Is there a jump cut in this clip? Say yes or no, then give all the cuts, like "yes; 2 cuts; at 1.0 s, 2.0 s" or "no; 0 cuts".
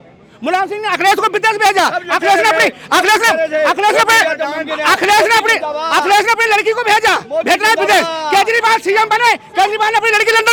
no; 0 cuts